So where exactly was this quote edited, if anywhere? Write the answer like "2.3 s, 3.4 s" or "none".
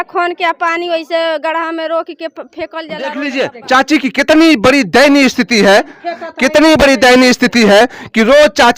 3.3 s